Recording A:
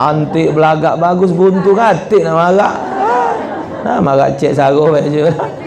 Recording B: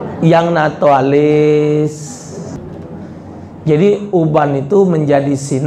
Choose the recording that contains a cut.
B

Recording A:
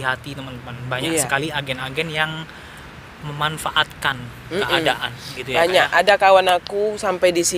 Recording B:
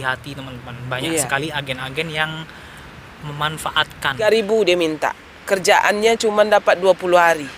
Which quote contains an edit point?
B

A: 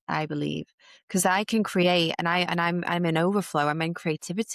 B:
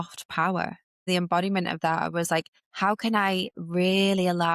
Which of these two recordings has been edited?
B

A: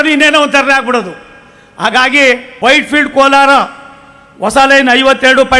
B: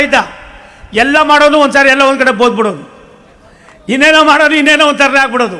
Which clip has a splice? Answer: A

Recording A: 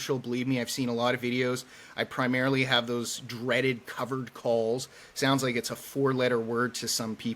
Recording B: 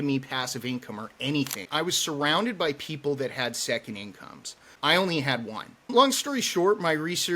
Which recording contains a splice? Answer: B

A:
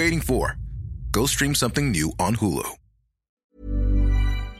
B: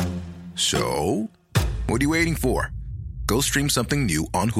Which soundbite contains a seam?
A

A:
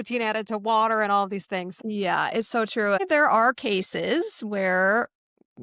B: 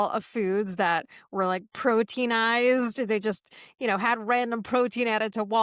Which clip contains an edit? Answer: A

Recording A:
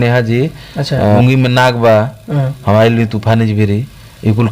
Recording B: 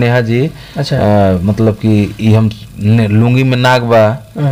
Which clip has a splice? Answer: A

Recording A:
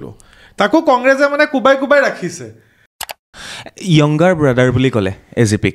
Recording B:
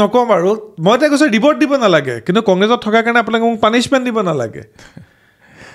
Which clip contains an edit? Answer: A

